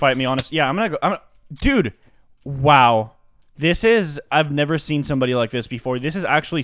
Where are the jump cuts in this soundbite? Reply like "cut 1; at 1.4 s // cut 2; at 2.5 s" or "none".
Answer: none